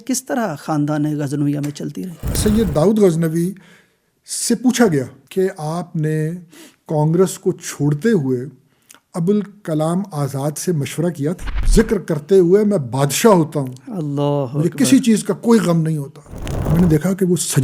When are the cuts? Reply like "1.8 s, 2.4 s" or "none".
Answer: 2.3 s, 5.2 s, 11.6 s, 16.5 s